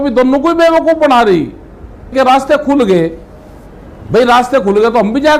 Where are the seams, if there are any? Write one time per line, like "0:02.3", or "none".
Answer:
0:02.1